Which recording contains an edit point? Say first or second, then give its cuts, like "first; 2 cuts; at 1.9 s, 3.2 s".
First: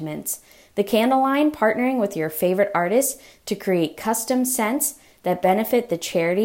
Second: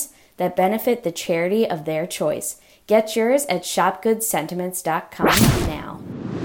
second; 1 cut; at 5.1 s